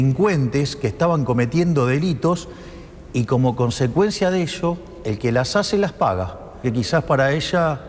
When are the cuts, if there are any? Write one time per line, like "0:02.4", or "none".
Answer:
0:06.5